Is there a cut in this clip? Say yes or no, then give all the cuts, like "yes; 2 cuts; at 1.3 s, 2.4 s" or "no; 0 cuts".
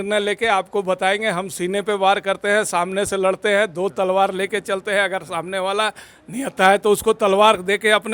no; 0 cuts